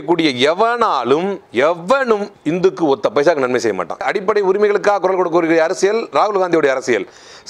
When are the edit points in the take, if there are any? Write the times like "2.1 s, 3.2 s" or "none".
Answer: 1.4 s, 2.3 s, 4.1 s